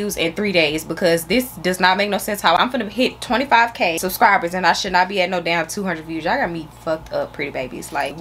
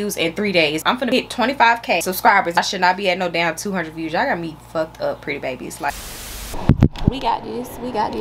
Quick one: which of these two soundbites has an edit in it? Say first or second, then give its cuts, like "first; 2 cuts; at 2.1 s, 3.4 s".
second; 3 cuts; at 0.9 s, 2.3 s, 6.1 s